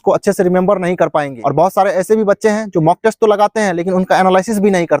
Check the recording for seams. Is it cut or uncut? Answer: cut